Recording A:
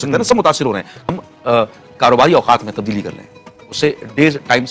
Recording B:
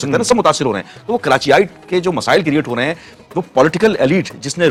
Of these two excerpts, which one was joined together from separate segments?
A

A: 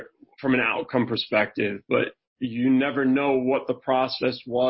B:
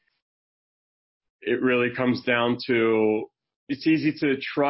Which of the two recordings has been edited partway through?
B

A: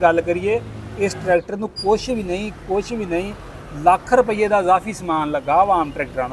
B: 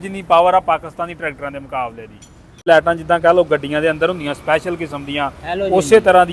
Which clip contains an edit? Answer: B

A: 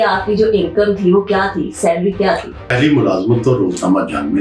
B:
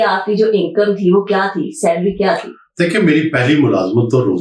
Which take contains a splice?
A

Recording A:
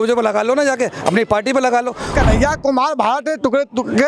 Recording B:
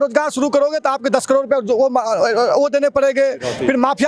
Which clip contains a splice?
A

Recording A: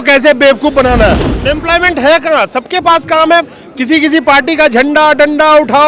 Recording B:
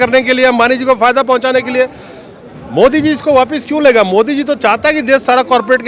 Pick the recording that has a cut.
A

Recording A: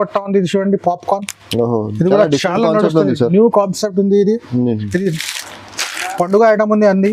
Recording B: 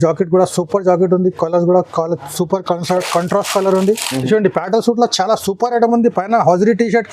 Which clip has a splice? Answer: B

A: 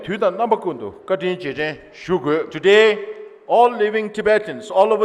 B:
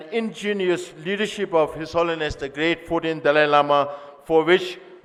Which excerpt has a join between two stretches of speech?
A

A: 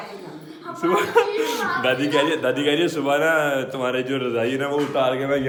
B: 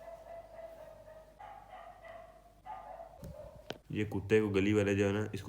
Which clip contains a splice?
B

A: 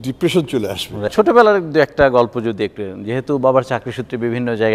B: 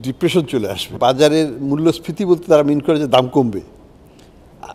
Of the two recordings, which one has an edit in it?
B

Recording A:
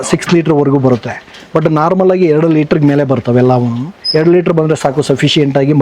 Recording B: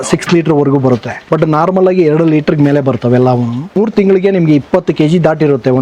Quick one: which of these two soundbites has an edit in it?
B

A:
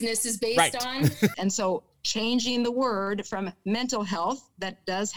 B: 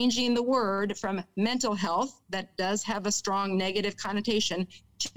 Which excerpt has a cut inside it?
A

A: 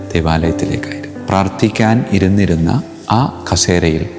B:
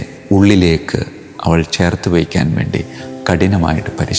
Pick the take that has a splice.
A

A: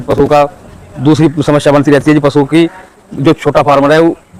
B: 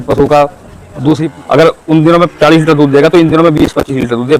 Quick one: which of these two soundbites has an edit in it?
B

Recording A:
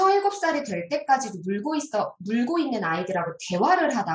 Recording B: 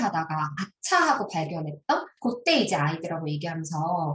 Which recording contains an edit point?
B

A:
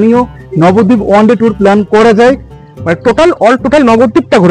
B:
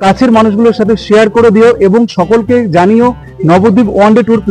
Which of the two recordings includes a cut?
A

